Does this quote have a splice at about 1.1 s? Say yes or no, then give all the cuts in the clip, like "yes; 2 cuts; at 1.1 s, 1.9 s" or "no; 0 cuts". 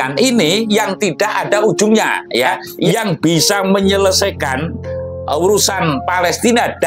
no; 1 cut; at 2.7 s